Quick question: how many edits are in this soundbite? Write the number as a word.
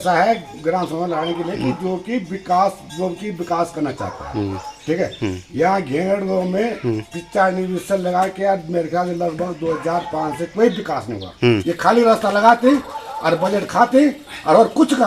one